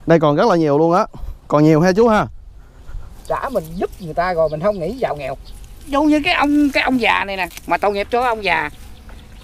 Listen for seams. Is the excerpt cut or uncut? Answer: cut